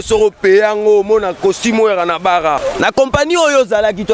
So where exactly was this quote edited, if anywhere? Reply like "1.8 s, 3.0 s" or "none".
2.6 s